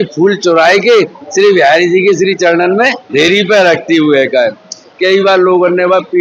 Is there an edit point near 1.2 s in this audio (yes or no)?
no